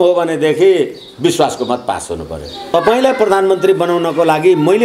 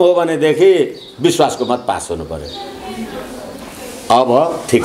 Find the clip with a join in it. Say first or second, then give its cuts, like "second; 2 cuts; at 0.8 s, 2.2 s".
first; 1 cut; at 2.7 s